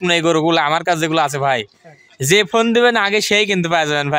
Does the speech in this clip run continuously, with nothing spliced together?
yes; 0 cuts

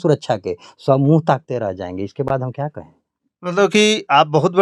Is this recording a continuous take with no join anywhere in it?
yes; 0 cuts

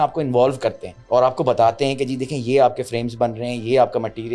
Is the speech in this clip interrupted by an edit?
yes; 1 cut; at 0.9 s

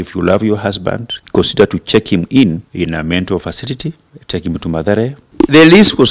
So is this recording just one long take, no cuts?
no; 4 cuts; at 1.2 s, 2.7 s, 4.1 s, 5.2 s

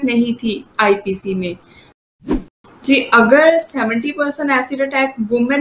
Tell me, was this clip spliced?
yes; 1 cut; at 2.2 s

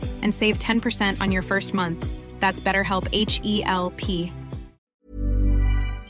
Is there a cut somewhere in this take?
yes; 1 cut; at 5.0 s

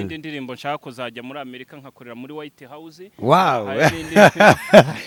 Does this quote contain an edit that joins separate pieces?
no; 0 cuts

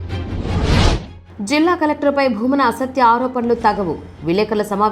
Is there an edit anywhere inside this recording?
yes; 1 cut; at 1.2 s

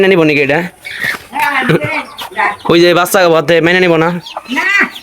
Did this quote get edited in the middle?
no; 0 cuts

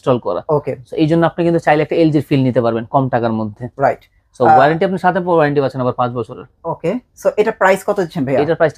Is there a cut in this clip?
no; 0 cuts

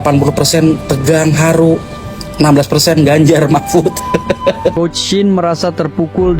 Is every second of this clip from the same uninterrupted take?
no; 1 cut; at 4.7 s

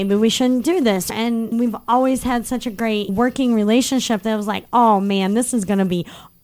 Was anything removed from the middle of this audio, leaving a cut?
yes; 2 cuts; at 1.1 s, 3.1 s

